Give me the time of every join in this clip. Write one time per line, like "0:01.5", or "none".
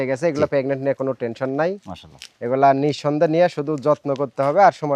none